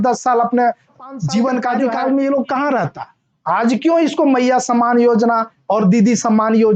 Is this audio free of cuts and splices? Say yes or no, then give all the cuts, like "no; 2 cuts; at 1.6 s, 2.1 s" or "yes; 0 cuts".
no; 1 cut; at 1.9 s